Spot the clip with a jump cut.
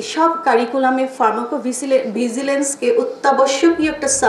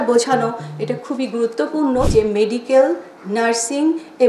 second; 1 cut; at 2.1 s

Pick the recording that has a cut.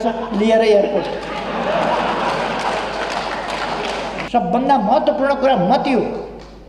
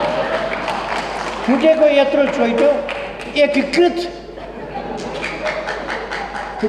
first; 1 cut; at 4.2 s

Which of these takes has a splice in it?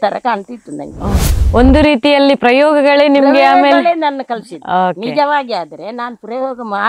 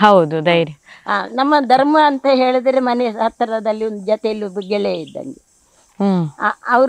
first; 1 cut; at 1.3 s

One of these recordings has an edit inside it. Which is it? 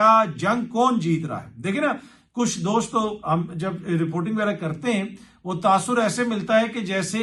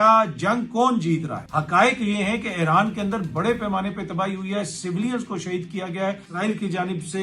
second; 2 cuts; at 1.4 s, 6.3 s

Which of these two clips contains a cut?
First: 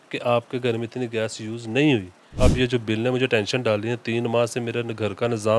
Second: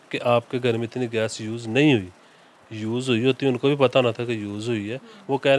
first; 1 cut; at 2.3 s

